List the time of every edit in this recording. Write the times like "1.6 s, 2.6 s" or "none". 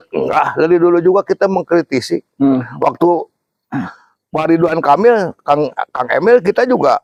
none